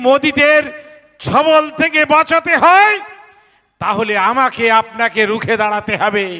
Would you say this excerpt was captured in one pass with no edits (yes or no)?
yes